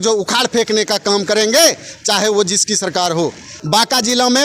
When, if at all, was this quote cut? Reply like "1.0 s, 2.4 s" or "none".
3.5 s